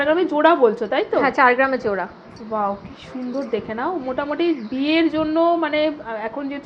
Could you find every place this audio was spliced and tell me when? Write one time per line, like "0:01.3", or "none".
none